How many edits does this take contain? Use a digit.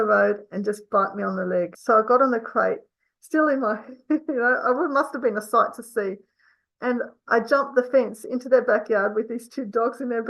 1